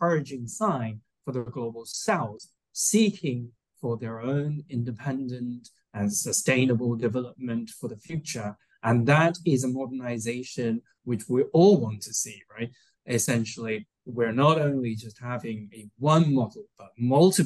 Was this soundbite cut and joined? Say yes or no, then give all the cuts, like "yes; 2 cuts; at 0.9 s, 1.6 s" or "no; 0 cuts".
no; 0 cuts